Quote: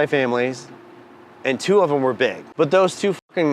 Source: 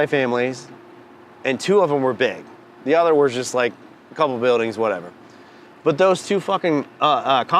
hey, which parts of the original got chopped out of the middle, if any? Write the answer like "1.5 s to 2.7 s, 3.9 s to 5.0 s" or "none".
2.4 s to 5.7 s